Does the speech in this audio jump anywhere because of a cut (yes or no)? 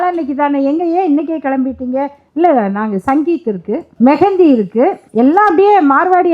yes